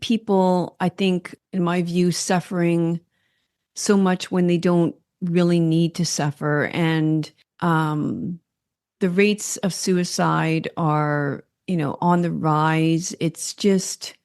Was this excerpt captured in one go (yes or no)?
no